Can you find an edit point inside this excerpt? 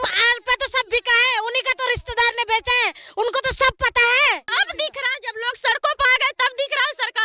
yes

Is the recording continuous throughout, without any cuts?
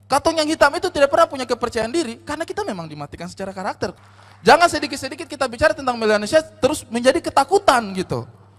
no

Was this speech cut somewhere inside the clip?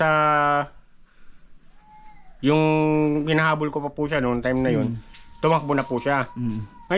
no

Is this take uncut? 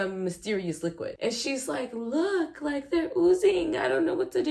no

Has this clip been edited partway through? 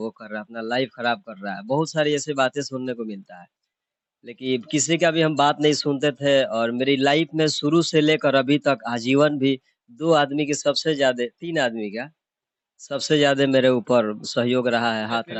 no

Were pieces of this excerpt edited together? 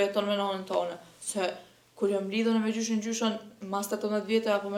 no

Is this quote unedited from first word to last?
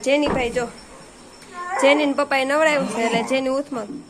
yes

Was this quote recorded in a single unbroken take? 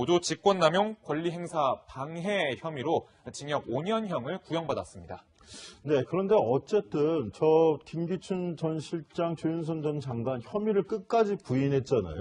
no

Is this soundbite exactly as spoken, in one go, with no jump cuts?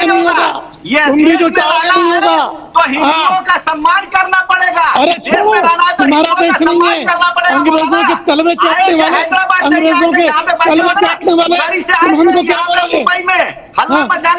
yes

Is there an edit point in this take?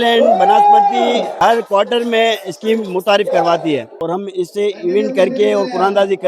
yes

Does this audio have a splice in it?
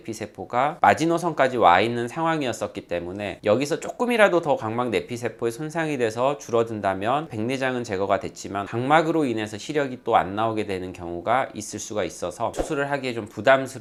no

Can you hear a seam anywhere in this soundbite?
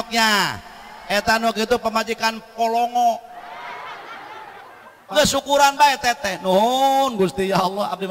yes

